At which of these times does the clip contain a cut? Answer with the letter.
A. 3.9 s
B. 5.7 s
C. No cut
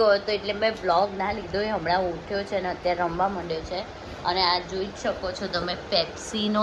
C